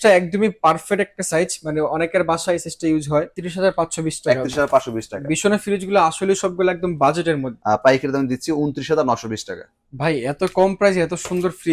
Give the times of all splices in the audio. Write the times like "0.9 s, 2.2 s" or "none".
3.4 s, 7.5 s